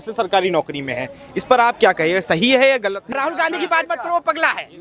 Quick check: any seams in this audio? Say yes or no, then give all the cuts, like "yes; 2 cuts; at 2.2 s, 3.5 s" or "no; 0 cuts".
yes; 1 cut; at 3.1 s